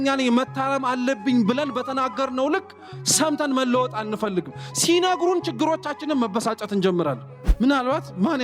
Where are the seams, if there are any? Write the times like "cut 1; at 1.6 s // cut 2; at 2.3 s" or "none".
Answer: cut 1; at 7.2 s